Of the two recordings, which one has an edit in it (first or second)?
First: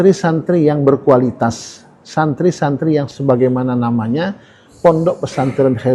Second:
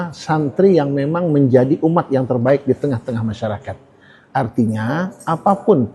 first